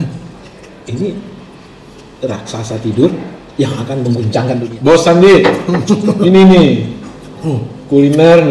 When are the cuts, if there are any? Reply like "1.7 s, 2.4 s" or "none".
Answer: 4.6 s